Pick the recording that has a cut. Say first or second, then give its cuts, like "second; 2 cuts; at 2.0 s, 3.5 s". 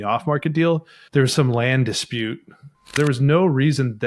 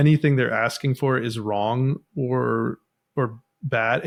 first; 2 cuts; at 0.9 s, 2.9 s